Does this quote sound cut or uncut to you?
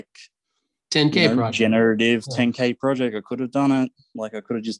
uncut